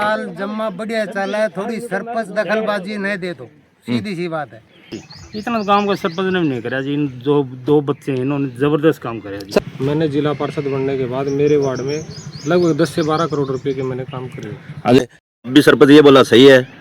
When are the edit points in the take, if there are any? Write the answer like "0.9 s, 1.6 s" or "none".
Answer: 5.0 s, 9.6 s, 15.0 s